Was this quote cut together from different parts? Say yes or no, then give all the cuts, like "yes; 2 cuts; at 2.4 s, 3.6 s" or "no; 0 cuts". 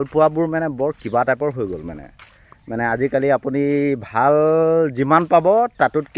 no; 0 cuts